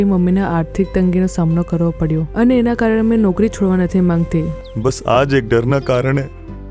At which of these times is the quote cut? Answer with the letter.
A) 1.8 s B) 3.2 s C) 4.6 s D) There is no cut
C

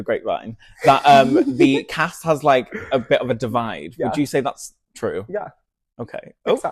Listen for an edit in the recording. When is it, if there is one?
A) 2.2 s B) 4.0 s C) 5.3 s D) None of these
D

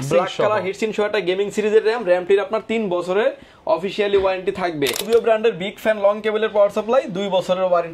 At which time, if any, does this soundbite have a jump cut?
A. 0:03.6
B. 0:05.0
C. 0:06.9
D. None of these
B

